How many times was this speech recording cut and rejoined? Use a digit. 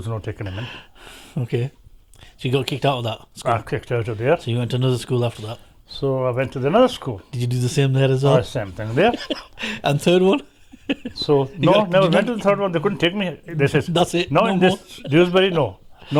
0